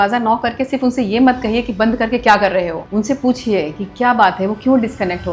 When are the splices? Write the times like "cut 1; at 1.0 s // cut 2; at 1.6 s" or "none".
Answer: cut 1; at 2.8 s